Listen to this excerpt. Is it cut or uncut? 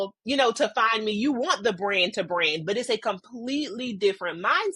uncut